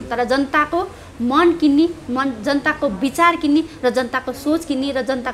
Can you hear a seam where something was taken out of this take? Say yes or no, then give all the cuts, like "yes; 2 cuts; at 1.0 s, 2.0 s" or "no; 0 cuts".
no; 0 cuts